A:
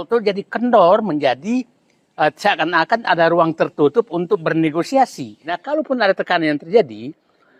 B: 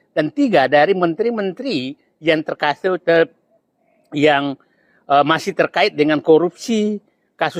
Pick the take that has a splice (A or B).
A